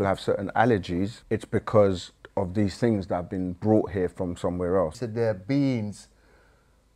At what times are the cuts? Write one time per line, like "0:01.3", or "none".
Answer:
0:01.2
0:02.1
0:05.0